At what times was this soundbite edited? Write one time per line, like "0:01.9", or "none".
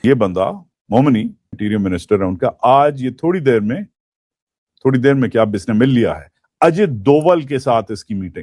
0:01.6